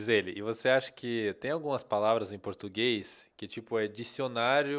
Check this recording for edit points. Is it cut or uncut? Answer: uncut